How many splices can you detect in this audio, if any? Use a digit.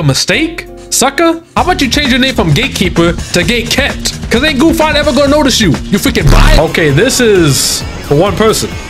1